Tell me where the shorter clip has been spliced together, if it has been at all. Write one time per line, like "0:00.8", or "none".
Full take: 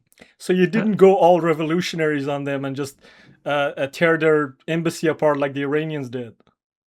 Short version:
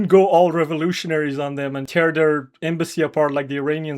0:01.9